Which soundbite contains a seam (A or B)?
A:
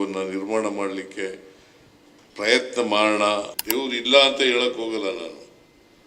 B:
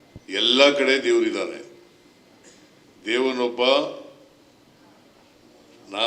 A